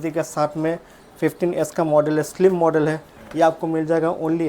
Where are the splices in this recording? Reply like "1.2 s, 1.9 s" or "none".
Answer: none